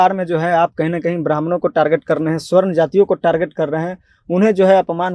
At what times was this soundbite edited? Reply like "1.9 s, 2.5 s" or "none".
none